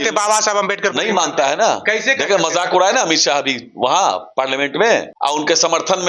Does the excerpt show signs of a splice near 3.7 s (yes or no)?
no